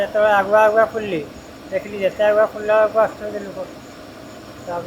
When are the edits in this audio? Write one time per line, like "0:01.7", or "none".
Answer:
none